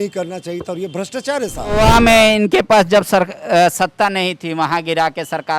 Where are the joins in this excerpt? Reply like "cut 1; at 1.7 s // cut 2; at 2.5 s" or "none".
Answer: cut 1; at 1.7 s